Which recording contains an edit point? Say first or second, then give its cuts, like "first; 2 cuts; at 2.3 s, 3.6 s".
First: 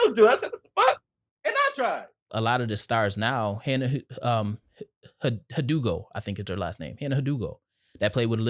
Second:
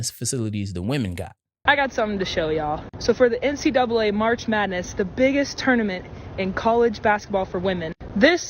first; 1 cut; at 2.3 s